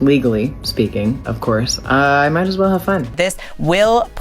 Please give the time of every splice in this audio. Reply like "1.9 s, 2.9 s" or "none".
3.1 s